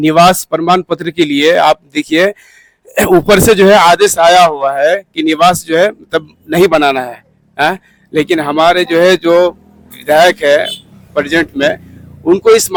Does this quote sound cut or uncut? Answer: uncut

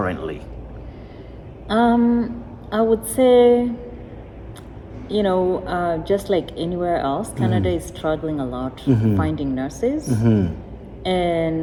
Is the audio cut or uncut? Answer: uncut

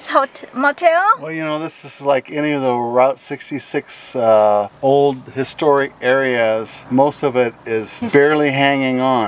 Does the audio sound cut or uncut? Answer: cut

